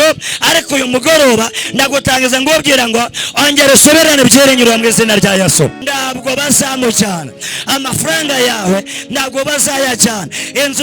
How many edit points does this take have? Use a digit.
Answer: 1